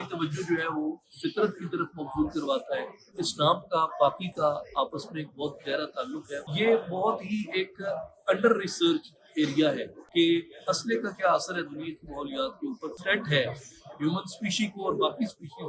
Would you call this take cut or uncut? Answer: cut